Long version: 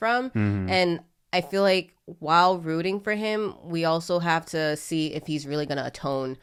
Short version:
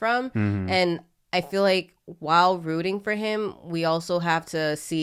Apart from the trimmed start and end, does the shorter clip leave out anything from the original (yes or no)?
no